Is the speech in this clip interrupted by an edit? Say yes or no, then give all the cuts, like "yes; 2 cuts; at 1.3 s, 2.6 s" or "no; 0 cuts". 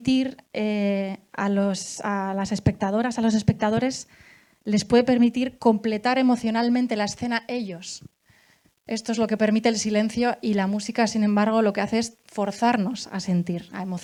no; 0 cuts